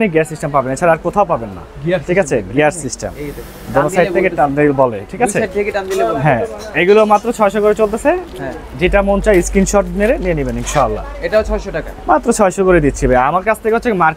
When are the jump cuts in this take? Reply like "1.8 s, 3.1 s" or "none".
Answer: none